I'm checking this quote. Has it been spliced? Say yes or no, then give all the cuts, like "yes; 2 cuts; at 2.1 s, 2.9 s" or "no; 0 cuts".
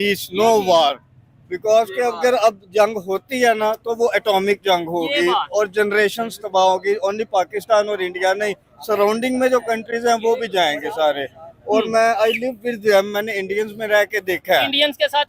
no; 0 cuts